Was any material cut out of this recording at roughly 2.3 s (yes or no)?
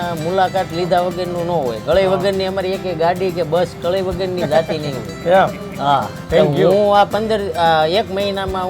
no